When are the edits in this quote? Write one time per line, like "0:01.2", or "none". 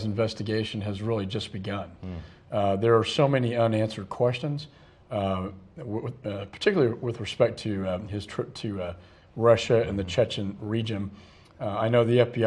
0:04.4